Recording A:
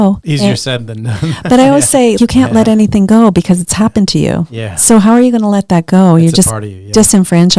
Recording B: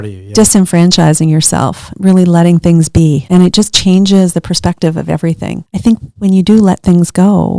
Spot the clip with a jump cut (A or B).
B